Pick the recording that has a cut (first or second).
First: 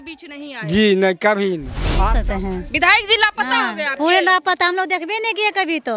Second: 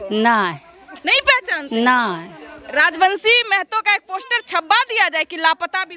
first